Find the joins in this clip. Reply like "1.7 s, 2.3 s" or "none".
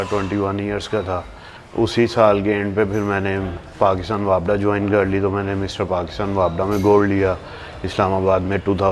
none